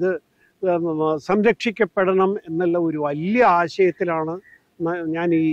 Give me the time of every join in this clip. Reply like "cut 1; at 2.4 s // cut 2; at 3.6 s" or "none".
none